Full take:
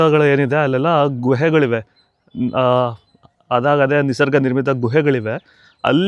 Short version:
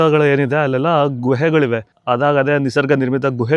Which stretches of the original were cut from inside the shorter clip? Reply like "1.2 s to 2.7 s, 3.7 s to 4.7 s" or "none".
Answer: 1.9 s to 3.4 s